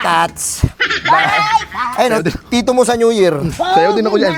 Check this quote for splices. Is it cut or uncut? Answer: uncut